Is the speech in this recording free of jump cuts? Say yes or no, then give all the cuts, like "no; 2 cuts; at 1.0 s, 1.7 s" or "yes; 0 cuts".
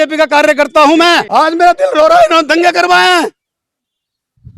no; 1 cut; at 1.2 s